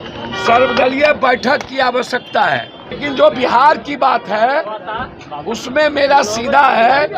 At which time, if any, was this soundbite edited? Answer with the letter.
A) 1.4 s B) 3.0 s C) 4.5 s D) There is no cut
B